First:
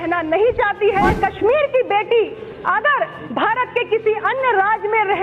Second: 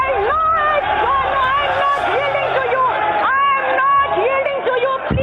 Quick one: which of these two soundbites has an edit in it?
first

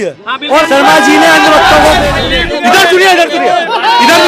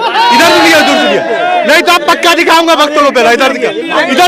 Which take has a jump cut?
first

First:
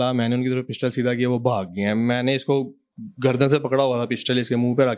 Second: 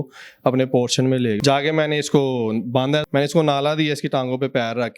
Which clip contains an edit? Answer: second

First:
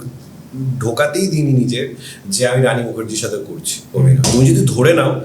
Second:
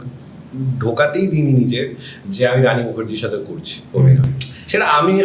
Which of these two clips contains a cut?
first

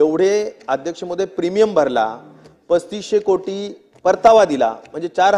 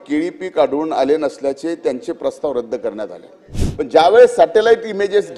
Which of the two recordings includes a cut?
second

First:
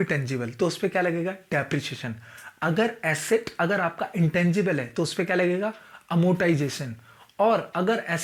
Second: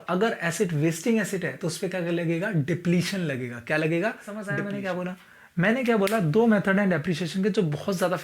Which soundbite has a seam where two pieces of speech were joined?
second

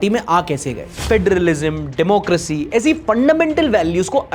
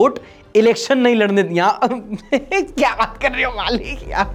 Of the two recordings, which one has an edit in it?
first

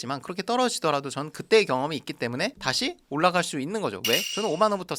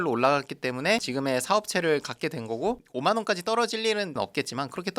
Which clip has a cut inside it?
second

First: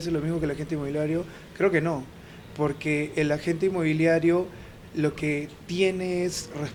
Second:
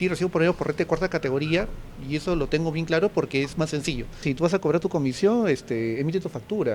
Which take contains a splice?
second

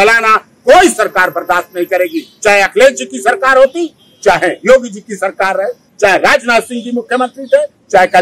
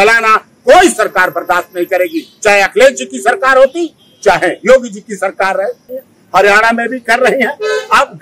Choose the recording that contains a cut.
second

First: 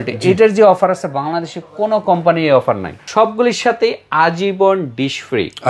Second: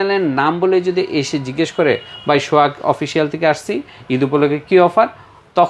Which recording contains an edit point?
first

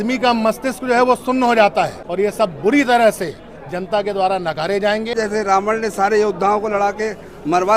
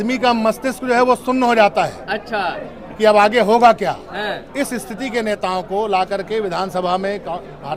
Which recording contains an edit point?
first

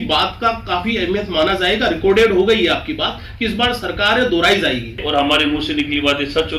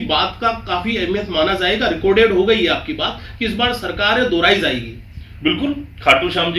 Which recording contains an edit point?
first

